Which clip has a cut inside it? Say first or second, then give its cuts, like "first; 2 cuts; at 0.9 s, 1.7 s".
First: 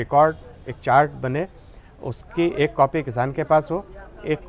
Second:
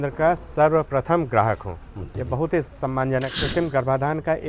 second; 1 cut; at 3.4 s